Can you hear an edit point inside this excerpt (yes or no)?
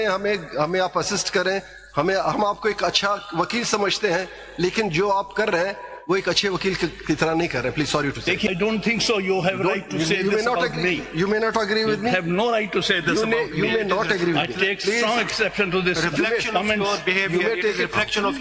yes